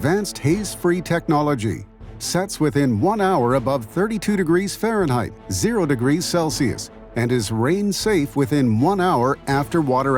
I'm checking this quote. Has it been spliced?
no; 0 cuts

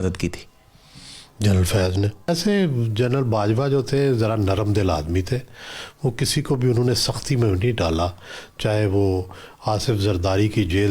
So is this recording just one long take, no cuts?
no; 1 cut; at 2.3 s

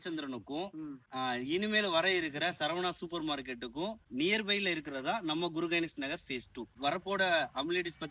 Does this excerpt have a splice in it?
no; 0 cuts

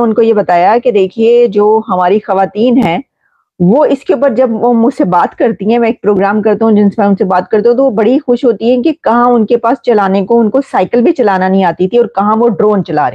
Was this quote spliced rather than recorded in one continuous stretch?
no; 0 cuts

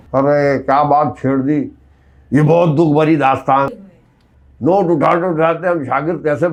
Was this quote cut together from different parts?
no; 0 cuts

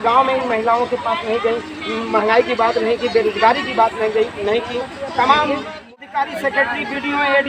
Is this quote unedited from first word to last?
no; 1 cut; at 6.0 s

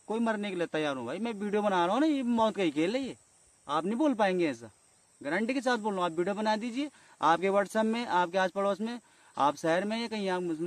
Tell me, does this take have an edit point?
no; 0 cuts

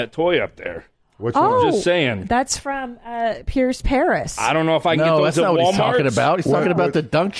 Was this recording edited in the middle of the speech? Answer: no; 0 cuts

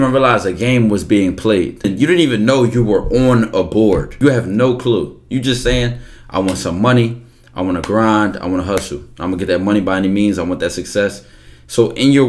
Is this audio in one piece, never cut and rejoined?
no; 2 cuts; at 1.9 s, 4.1 s

